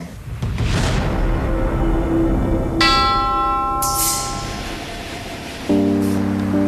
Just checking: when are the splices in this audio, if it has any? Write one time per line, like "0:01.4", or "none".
0:04.3